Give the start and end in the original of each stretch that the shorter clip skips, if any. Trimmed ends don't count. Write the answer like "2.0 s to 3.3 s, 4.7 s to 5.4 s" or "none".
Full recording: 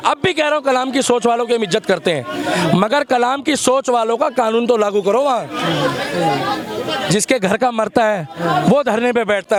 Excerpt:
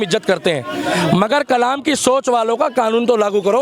none